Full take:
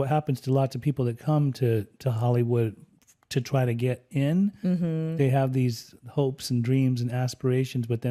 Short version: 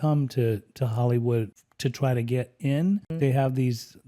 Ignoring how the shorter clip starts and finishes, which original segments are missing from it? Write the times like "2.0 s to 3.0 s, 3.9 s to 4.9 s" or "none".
2.9 s to 3.1 s, 4.6 s to 5.1 s